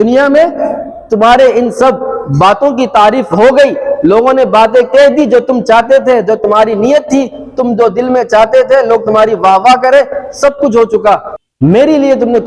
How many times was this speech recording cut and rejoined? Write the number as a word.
one